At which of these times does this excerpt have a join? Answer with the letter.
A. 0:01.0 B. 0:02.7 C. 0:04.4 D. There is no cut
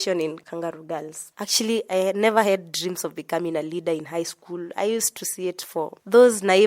A